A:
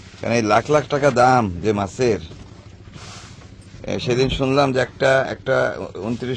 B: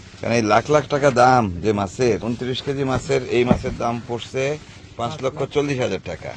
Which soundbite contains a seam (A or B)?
B